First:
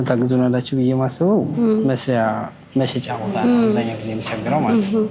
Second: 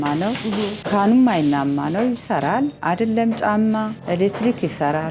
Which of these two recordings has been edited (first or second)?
second